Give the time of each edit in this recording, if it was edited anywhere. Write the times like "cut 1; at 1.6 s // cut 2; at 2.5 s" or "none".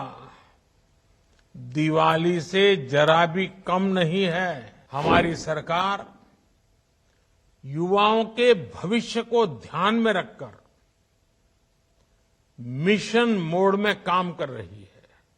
cut 1; at 4.7 s

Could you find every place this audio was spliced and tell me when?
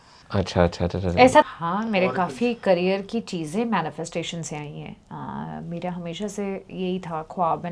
cut 1; at 1.4 s

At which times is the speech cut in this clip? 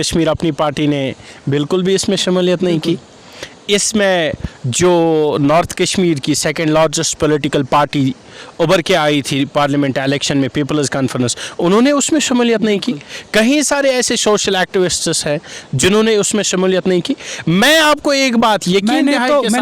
none

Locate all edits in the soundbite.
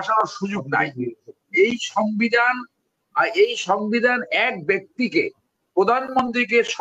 none

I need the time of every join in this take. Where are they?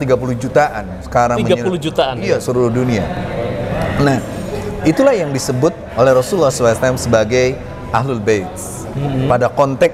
none

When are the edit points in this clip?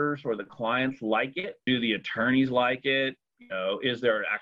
cut 1; at 1.6 s

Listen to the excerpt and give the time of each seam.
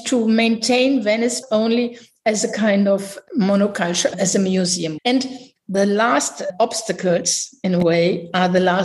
cut 1; at 1.4 s // cut 2; at 4.9 s

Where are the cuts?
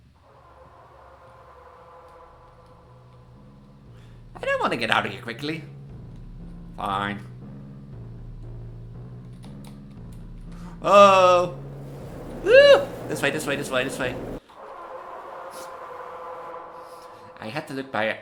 none

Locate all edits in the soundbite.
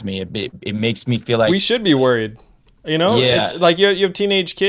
cut 1; at 1.5 s

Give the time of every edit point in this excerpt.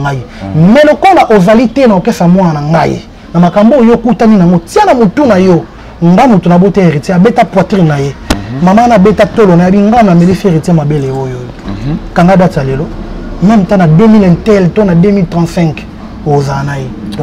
none

